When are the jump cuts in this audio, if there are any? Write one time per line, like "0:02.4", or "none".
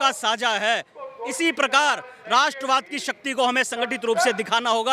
none